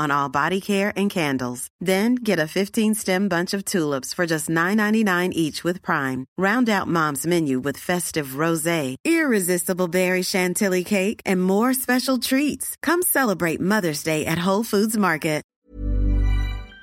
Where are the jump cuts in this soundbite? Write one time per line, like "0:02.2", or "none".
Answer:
0:15.5